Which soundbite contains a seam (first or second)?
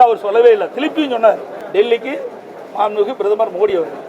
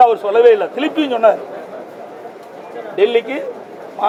first